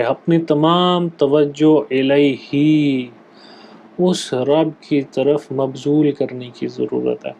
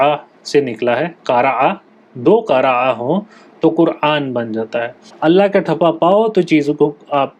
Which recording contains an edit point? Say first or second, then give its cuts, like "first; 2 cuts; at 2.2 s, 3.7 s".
second; 1 cut; at 5.0 s